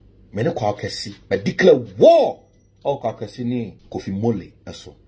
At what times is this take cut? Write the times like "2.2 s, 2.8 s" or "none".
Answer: 3.8 s